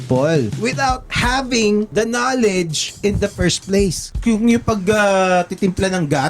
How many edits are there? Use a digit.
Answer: 4